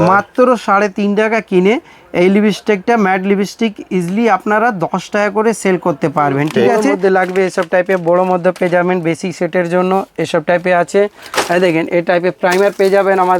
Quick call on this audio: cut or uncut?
cut